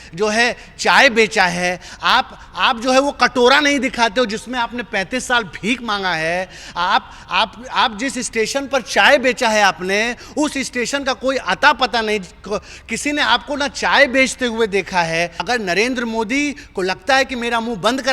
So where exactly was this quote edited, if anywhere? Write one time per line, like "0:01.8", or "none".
0:15.4